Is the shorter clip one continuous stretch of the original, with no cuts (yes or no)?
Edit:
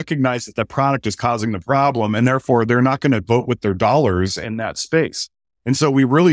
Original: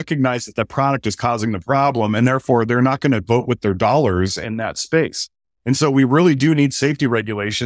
yes